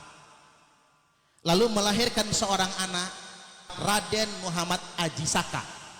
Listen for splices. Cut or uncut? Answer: cut